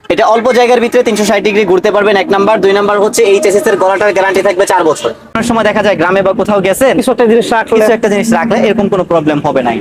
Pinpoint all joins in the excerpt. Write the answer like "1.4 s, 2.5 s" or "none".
5.4 s